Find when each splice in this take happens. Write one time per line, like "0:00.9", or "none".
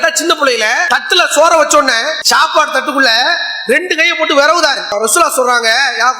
0:00.8
0:02.2
0:04.9